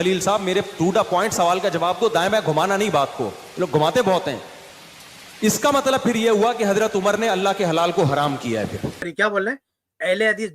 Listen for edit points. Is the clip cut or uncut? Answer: cut